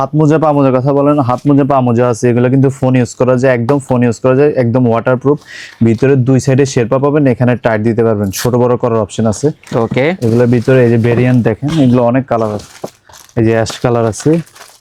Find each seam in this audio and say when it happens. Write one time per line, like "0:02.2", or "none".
none